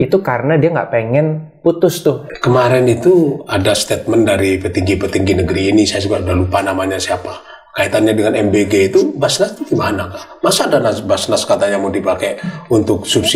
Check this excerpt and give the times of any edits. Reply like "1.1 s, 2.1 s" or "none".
2.3 s

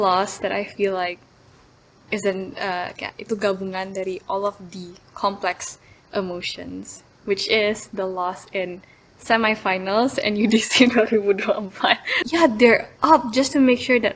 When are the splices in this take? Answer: 12.1 s

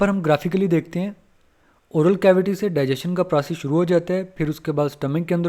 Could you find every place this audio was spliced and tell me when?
none

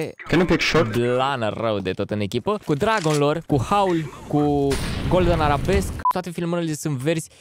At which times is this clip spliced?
2.6 s, 3.4 s, 6.1 s

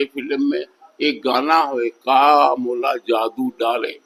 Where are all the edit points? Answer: none

